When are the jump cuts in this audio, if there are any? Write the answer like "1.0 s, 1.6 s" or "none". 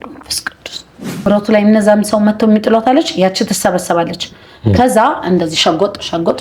1.3 s